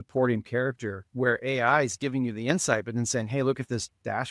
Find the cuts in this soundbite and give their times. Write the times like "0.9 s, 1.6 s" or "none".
none